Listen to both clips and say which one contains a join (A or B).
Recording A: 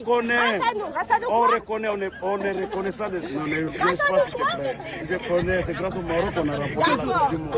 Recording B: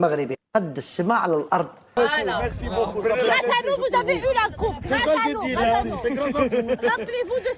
B